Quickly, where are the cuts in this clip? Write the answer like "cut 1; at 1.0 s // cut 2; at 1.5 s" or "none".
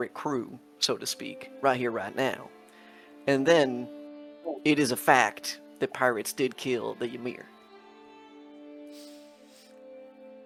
none